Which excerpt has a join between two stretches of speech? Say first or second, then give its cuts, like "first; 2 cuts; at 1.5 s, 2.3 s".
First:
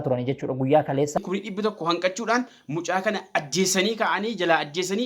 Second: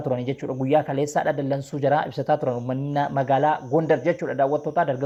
first; 1 cut; at 1.2 s